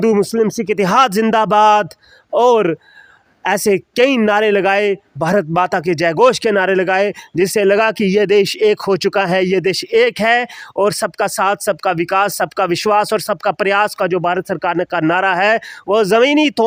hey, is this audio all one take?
yes; 0 cuts

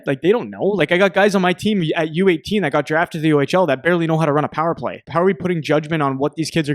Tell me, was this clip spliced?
yes; 1 cut; at 5.0 s

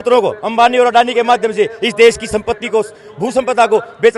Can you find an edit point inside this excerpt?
no; 0 cuts

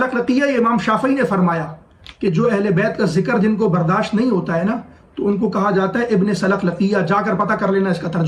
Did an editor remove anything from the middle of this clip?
no; 0 cuts

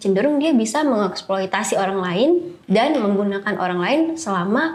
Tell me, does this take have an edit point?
no; 0 cuts

